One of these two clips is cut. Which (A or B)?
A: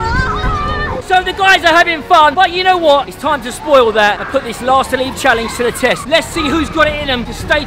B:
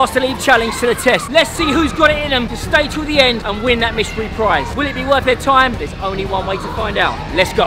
A